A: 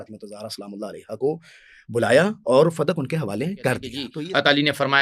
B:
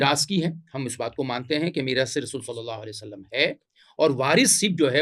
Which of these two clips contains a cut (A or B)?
A